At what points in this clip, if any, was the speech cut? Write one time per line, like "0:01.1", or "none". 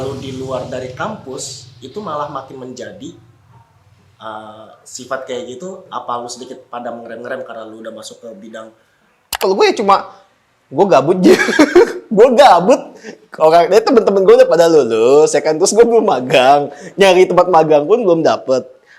0:09.2